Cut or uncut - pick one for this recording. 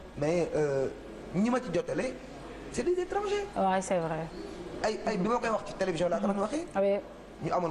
uncut